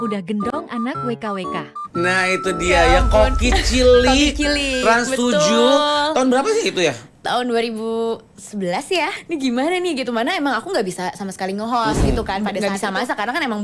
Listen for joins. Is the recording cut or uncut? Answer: cut